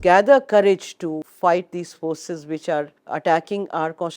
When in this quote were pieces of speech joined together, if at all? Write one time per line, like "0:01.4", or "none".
0:01.3
0:03.0